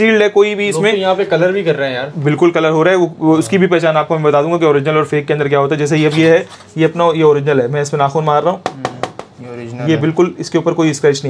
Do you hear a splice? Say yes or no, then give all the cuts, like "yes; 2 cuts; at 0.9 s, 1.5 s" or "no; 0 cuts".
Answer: no; 0 cuts